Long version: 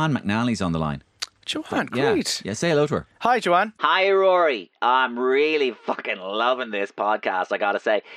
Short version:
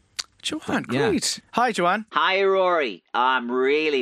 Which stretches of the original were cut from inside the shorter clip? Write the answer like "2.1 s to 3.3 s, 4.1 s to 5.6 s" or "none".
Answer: 2.4 s to 3.1 s